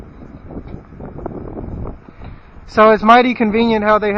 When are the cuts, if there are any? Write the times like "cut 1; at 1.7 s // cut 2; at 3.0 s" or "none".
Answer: cut 1; at 3.3 s